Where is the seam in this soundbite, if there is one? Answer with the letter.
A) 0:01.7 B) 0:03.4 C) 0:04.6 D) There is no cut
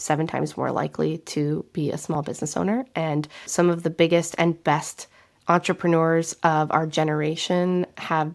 B